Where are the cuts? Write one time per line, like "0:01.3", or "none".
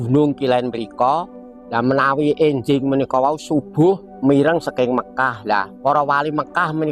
0:04.1
0:05.7